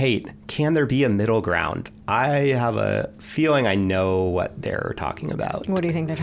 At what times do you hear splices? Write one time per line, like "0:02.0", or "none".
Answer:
none